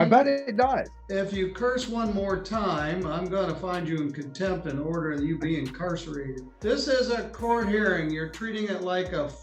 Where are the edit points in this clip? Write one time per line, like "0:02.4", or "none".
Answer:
0:01.0
0:06.4